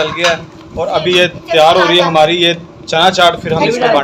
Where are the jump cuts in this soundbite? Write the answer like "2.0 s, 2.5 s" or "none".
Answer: none